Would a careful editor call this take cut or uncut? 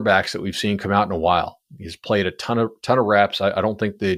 uncut